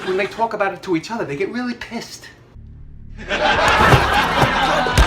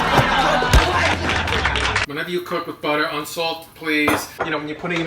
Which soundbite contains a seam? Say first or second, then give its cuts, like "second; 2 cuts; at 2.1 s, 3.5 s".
second; 1 cut; at 1.9 s